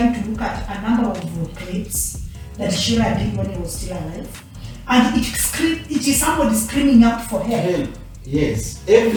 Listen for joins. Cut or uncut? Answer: uncut